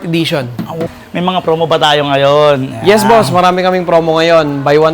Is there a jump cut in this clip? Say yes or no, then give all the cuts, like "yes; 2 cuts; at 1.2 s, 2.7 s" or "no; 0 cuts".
yes; 1 cut; at 1.0 s